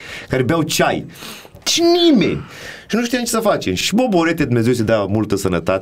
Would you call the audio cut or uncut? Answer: uncut